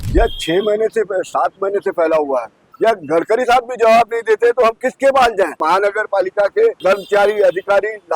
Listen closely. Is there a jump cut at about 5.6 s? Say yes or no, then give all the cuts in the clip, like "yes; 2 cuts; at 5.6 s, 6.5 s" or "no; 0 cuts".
yes; 3 cuts; at 2.6 s, 5.6 s, 6.8 s